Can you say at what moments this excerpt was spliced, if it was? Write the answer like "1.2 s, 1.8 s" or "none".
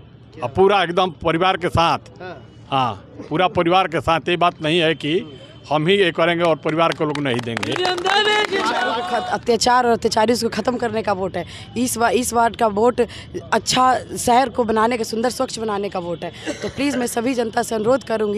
9.0 s